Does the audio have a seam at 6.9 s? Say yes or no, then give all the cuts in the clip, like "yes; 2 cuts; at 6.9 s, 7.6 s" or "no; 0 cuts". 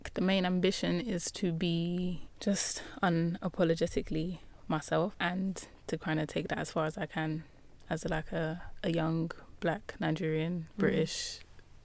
no; 3 cuts; at 2.3 s, 5.2 s, 8.7 s